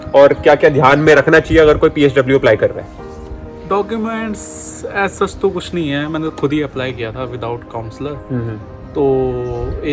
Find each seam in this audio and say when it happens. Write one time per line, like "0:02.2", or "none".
none